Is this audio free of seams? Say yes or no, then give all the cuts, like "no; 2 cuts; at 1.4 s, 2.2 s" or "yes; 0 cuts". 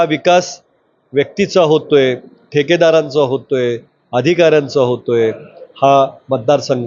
yes; 0 cuts